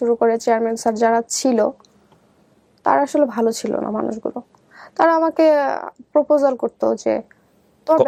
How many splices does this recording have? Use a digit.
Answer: 0